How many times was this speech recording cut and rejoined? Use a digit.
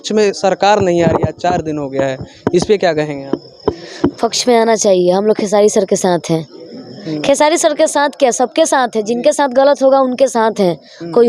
0